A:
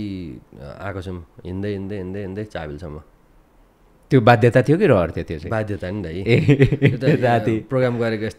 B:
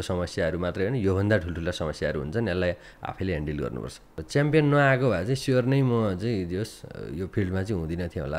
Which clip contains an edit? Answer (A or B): B